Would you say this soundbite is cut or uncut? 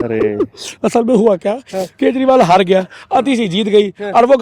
uncut